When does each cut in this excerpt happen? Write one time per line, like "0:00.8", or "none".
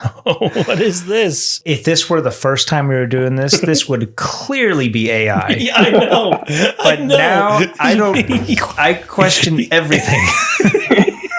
0:01.6